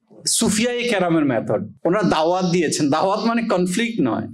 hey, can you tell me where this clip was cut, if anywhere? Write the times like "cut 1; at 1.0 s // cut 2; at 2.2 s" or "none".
cut 1; at 1.7 s